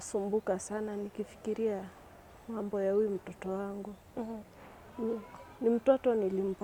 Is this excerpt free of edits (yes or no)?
yes